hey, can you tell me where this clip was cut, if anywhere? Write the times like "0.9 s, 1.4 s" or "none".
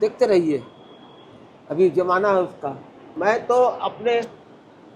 3.0 s